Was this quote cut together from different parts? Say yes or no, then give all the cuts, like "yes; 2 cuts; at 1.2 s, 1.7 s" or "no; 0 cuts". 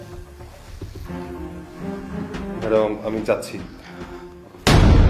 no; 0 cuts